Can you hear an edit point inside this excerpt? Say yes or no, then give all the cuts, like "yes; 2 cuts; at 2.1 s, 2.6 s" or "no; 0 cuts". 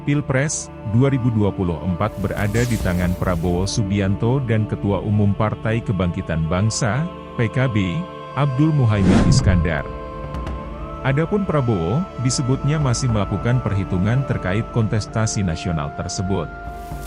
no; 0 cuts